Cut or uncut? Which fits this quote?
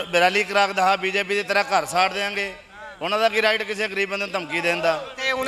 uncut